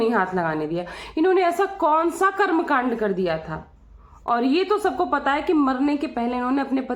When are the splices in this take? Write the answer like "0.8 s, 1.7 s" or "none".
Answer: none